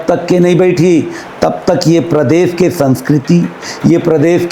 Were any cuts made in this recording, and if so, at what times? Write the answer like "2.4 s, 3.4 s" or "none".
none